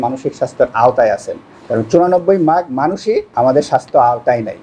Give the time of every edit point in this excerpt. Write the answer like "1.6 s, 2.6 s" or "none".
3.3 s